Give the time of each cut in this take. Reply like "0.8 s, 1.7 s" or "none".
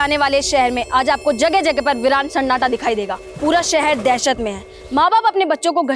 3.2 s